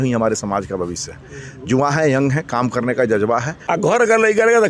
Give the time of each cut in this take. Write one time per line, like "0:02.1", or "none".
0:03.6